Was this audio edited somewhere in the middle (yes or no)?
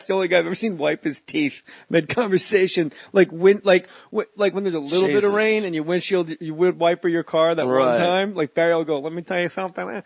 no